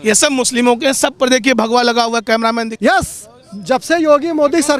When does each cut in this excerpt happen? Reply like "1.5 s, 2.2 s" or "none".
2.7 s

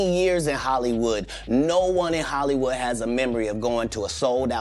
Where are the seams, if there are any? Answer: none

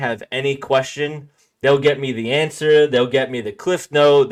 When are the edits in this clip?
none

